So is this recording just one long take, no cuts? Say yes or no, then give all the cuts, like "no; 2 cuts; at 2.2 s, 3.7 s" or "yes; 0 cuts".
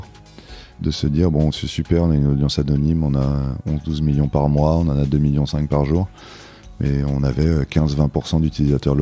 yes; 0 cuts